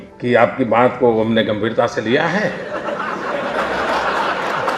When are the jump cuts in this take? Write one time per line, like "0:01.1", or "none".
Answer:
0:02.6